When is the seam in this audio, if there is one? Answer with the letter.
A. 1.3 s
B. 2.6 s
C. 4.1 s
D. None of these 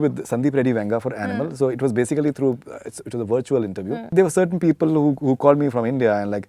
C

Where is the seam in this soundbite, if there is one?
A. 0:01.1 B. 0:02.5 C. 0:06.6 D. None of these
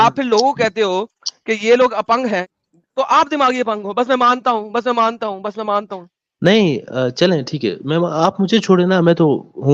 B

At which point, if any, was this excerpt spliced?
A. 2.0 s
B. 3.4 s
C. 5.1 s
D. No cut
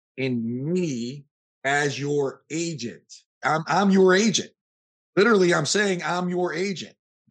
B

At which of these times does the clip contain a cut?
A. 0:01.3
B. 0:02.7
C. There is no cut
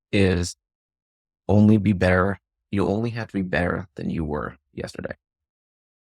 C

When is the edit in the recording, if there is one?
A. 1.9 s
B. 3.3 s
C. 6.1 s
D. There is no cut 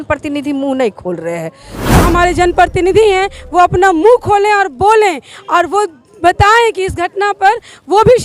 A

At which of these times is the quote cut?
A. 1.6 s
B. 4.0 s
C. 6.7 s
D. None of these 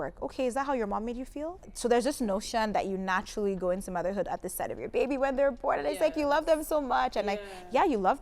A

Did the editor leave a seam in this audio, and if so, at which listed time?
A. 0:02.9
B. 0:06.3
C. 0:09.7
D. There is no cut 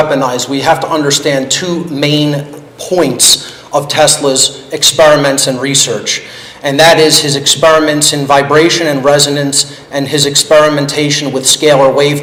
D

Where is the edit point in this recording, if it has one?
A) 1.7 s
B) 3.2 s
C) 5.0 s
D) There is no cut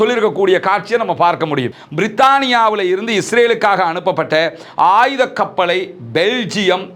A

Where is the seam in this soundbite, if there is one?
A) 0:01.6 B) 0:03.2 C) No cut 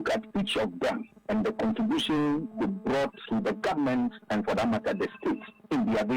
B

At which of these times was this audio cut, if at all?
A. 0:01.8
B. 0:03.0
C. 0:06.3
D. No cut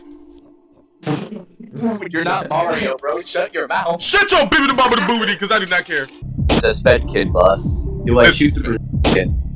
C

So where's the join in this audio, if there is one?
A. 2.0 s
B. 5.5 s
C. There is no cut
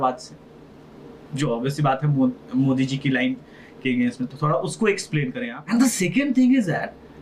B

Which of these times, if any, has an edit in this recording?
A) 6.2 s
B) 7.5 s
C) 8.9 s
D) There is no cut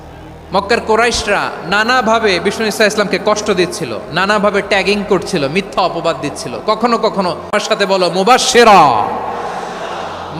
B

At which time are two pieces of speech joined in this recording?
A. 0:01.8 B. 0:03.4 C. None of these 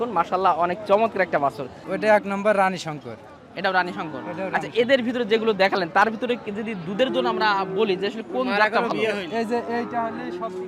A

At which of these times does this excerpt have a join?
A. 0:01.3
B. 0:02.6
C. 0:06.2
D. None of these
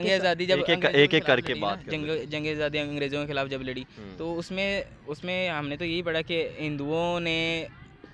D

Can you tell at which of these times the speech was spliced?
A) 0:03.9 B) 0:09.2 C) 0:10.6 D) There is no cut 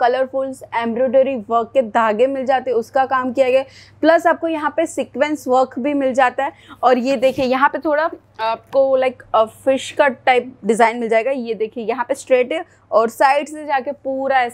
D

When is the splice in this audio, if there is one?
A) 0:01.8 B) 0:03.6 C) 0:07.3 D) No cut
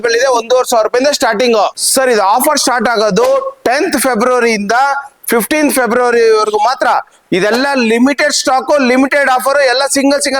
A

